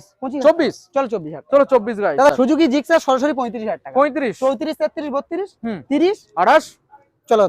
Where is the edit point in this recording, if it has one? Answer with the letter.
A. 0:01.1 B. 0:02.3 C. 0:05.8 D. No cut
B